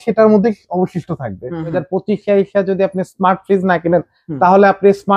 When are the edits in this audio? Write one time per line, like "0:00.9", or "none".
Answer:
0:01.8

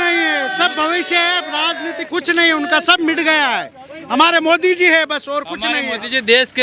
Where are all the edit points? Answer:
none

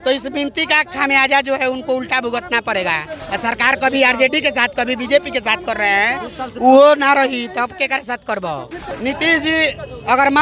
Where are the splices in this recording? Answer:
0:03.2
0:08.9

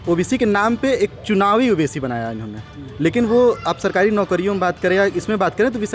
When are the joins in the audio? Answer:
none

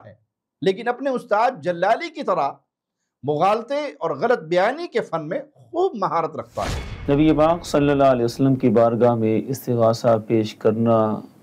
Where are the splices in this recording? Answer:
0:06.9

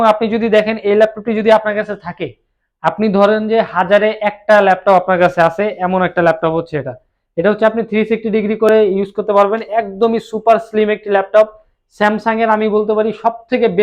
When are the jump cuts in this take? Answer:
none

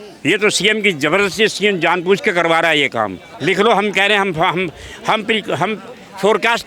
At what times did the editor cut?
0:03.3

